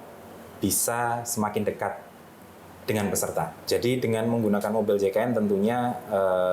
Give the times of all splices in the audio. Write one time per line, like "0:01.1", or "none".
0:03.6